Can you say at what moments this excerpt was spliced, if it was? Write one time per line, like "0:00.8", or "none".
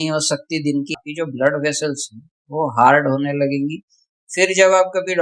0:01.0